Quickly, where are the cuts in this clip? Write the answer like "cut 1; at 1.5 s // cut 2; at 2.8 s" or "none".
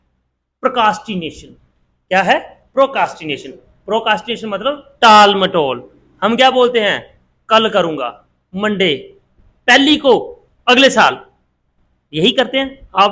none